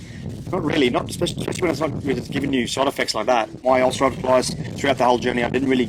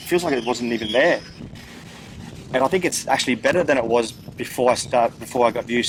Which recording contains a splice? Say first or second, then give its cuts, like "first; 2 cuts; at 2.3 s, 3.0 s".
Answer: first; 1 cut; at 3.6 s